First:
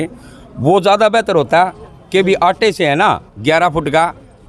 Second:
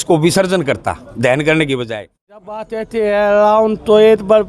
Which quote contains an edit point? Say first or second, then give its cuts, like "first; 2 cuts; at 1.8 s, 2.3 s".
second; 1 cut; at 2.4 s